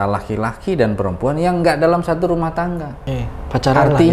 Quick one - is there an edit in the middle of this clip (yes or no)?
yes